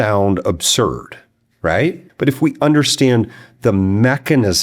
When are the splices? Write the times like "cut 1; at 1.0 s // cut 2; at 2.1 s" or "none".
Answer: cut 1; at 2.1 s